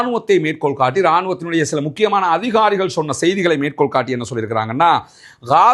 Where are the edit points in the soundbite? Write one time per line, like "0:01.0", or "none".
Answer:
0:02.3